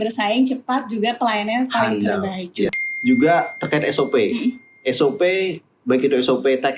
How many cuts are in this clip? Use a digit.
1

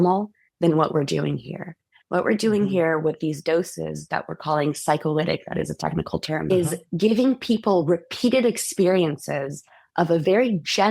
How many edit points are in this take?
1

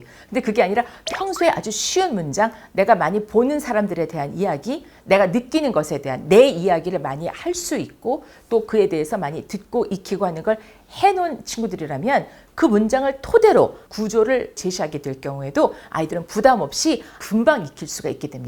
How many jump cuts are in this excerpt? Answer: 1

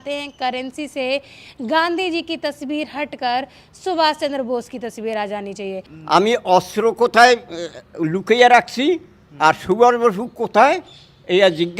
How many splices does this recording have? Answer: 1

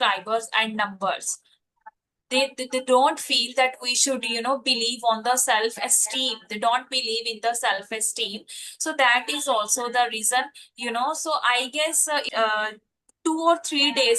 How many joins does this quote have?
1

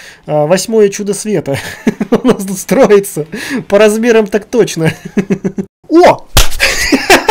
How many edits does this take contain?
1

